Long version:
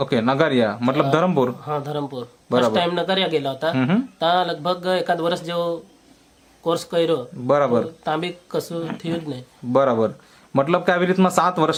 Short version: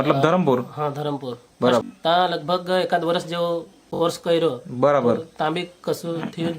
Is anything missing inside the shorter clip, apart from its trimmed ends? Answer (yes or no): yes